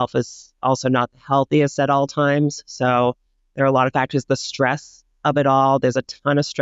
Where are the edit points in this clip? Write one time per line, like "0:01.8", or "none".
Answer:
none